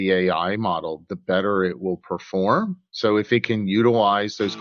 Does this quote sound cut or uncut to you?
uncut